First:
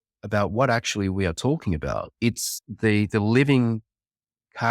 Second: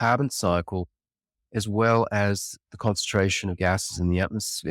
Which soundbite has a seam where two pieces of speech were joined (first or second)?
first